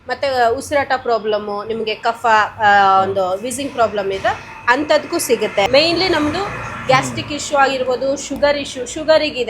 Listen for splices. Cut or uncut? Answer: cut